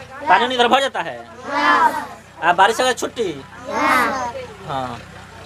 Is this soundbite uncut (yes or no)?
yes